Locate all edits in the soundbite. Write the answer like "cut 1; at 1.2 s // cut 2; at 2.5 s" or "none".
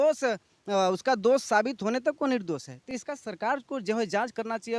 none

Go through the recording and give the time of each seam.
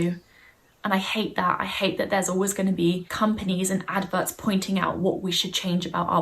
cut 1; at 3.1 s

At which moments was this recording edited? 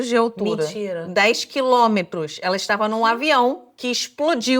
cut 1; at 3.7 s

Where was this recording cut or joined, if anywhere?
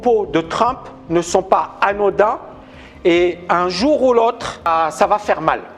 cut 1; at 4.7 s

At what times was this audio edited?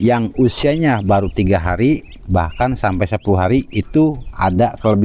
none

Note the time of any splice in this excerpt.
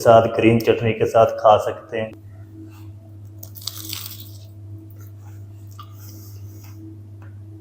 cut 1; at 2.1 s

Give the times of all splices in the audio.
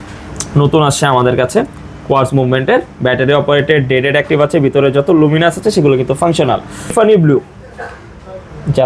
cut 1; at 7.1 s

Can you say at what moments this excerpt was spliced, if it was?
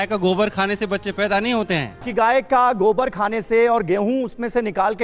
cut 1; at 2.0 s

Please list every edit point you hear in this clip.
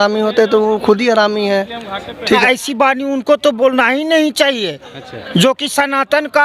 cut 1; at 2.3 s

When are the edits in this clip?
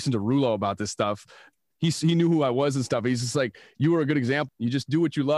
cut 1; at 1.5 s // cut 2; at 4.5 s

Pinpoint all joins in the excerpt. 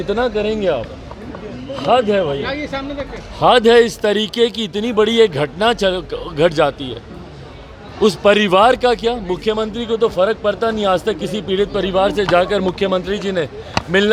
none

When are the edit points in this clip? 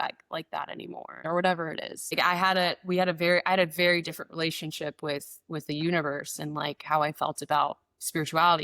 cut 1; at 1.2 s // cut 2; at 2.1 s

